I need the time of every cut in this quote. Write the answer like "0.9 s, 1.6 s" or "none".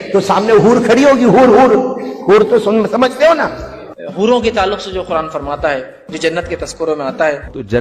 none